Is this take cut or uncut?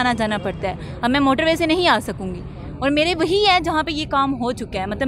uncut